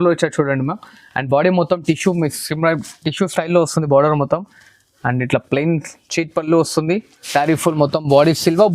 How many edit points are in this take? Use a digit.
1